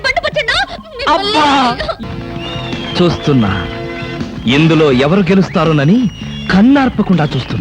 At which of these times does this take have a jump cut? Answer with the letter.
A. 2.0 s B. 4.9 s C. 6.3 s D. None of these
A